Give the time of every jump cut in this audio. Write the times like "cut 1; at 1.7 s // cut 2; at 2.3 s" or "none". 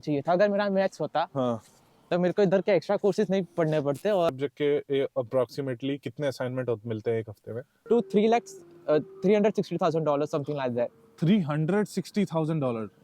cut 1; at 4.3 s // cut 2; at 7.8 s